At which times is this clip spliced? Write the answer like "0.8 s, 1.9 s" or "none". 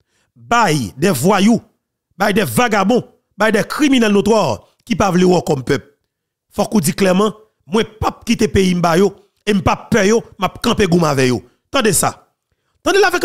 none